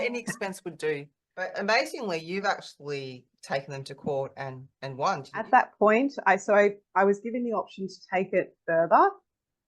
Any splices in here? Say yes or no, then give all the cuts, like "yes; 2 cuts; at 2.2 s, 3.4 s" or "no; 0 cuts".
yes; 2 cuts; at 1.5 s, 5.5 s